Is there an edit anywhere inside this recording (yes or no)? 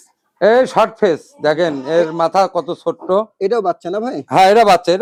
no